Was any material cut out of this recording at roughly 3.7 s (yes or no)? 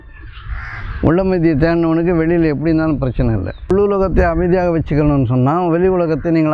yes